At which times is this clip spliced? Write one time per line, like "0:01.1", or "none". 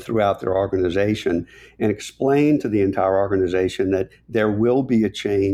none